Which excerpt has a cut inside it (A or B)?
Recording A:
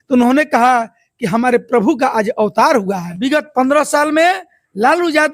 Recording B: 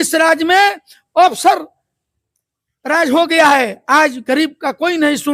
A